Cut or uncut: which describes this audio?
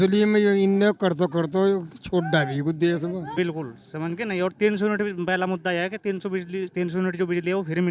cut